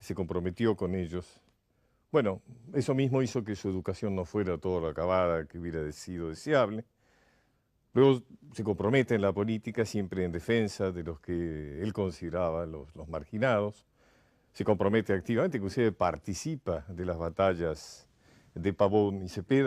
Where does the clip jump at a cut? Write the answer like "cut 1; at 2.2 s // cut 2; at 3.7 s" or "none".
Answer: cut 1; at 15.7 s